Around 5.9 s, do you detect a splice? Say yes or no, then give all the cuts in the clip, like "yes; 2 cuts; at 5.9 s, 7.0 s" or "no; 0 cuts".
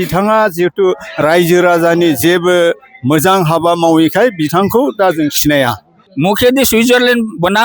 yes; 1 cut; at 5.9 s